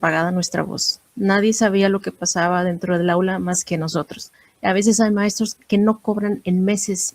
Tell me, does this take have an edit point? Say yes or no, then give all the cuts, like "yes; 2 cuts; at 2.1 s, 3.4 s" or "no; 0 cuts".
yes; 2 cuts; at 4.3 s, 5.6 s